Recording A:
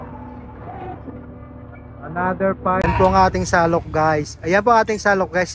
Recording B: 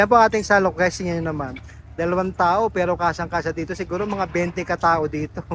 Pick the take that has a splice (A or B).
A